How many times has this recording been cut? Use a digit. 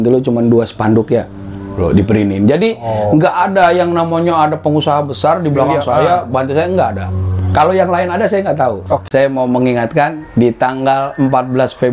1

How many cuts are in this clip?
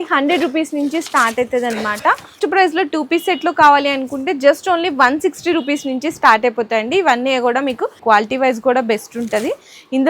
2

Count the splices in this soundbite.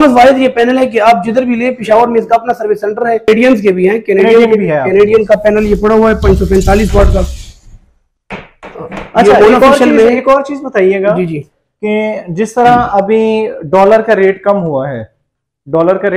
1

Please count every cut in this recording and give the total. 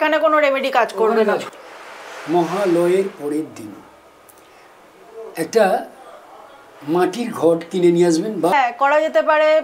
2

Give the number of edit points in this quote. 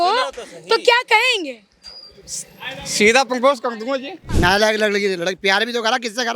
1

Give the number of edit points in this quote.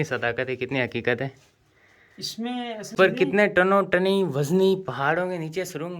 1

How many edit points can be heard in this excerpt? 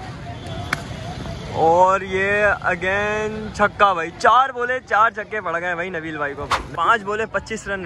1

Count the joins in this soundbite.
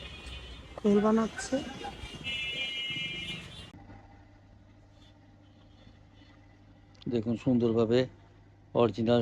1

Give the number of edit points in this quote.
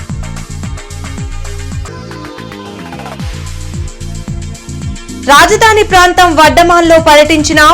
1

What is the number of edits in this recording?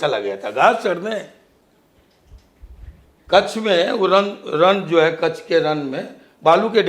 0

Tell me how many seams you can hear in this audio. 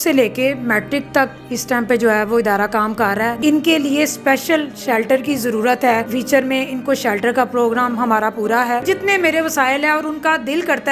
3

